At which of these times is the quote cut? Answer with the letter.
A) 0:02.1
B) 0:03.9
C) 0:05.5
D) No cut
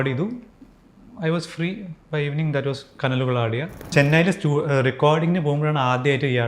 B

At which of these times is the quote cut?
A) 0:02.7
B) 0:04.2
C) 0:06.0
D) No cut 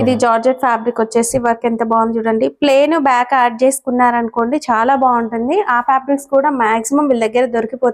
D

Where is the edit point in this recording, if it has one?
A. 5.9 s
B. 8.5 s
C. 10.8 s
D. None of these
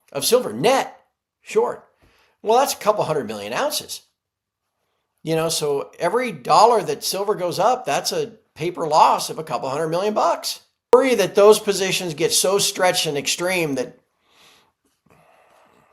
C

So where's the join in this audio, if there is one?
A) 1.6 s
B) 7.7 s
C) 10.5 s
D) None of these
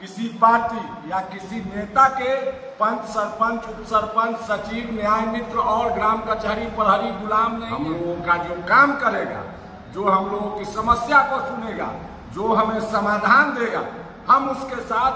B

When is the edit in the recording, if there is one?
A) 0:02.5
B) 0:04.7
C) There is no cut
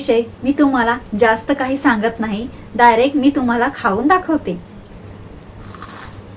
B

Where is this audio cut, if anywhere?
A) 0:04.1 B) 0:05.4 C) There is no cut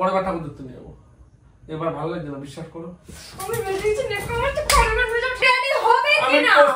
B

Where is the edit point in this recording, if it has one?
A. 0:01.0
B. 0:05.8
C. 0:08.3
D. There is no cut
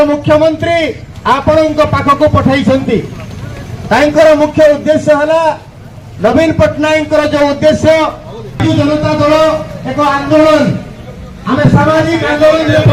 D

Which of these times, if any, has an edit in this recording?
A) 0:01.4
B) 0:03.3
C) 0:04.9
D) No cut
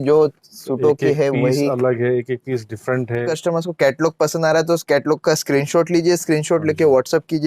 B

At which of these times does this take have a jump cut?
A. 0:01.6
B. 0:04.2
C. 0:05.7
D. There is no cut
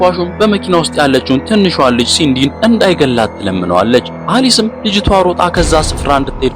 B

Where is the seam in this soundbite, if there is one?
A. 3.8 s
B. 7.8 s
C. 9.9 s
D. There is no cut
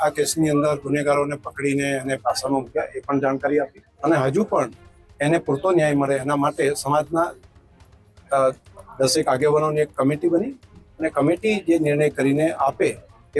A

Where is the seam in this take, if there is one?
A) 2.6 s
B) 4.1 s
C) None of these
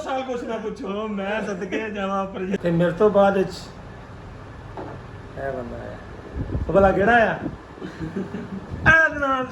A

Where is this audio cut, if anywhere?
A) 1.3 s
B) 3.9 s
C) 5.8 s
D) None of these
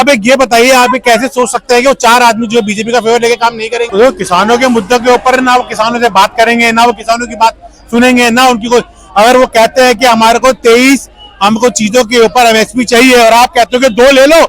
B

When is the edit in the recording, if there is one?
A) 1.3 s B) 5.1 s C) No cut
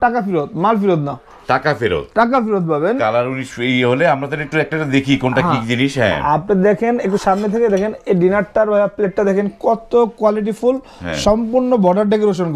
C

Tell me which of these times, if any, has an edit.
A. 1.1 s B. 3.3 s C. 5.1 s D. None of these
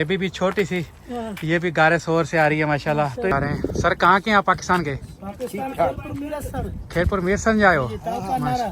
B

